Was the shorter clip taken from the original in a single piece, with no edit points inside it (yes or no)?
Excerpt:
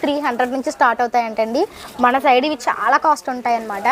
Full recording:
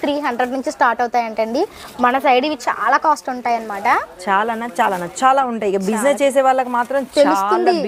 yes